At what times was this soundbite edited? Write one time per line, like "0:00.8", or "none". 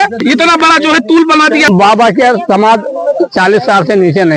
0:01.6